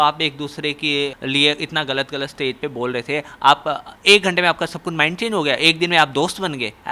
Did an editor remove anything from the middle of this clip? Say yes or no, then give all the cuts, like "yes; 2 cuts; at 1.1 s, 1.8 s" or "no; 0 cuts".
no; 0 cuts